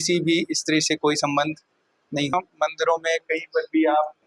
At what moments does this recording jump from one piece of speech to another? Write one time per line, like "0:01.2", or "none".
0:02.3